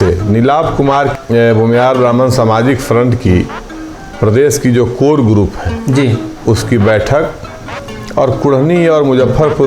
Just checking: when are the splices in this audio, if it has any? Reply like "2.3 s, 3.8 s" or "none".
1.1 s